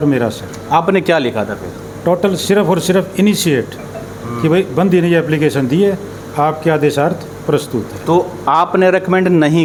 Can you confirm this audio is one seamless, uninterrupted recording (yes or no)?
yes